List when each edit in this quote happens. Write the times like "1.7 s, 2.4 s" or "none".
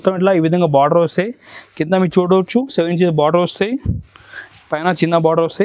none